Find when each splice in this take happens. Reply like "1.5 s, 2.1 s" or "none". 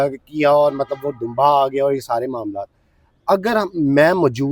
none